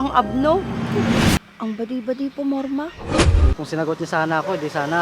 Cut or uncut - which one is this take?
cut